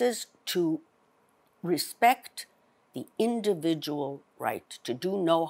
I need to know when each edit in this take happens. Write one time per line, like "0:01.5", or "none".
none